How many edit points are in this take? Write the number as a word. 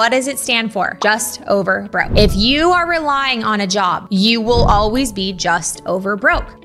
one